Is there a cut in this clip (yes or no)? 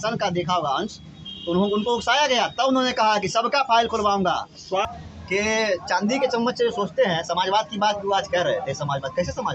yes